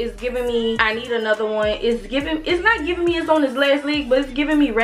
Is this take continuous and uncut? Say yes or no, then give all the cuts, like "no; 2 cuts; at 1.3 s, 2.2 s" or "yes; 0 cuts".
yes; 0 cuts